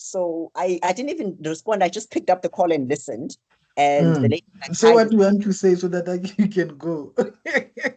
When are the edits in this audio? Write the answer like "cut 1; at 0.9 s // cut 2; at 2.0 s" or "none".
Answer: none

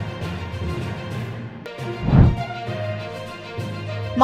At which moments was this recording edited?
cut 1; at 1.5 s

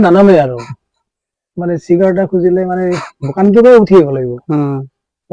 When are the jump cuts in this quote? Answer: none

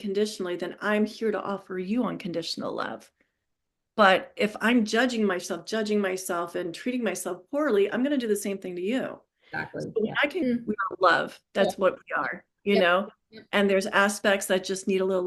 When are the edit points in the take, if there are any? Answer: cut 1; at 10.4 s

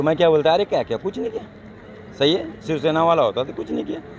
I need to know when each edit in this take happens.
none

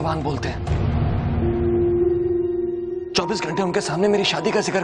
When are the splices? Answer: cut 1; at 2.4 s

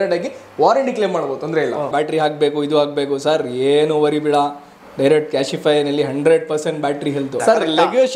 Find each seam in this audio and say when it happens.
cut 1; at 1.9 s // cut 2; at 7.4 s

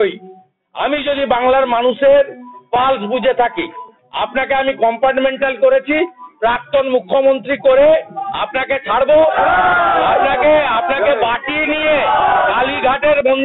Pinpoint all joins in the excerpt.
none

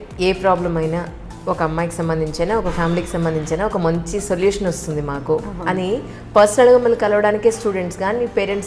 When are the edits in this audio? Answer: none

